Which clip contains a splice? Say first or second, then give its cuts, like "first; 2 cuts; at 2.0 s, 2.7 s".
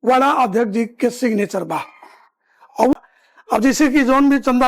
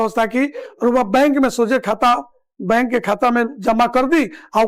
first; 1 cut; at 2.9 s